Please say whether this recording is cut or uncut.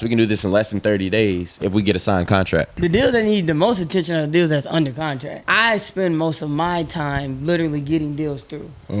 cut